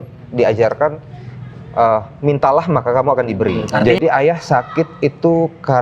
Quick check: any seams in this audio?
yes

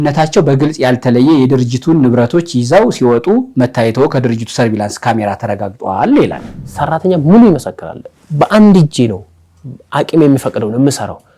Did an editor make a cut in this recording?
yes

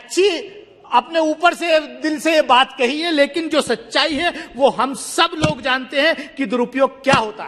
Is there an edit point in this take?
no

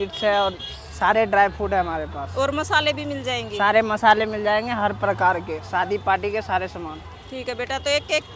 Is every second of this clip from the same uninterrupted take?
yes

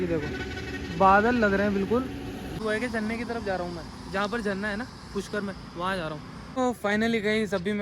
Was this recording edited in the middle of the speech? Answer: yes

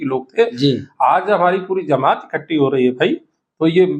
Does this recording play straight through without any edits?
yes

